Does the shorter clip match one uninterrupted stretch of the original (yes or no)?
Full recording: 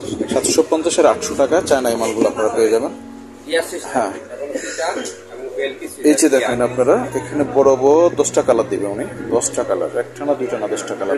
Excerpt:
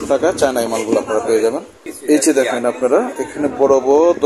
no